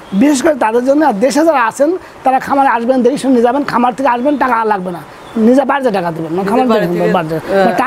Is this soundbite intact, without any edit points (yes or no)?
yes